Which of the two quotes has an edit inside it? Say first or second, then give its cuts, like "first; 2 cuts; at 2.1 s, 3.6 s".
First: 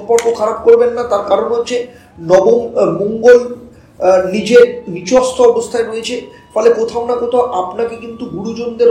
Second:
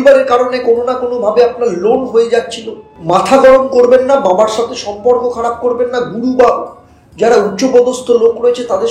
second; 1 cut; at 2.9 s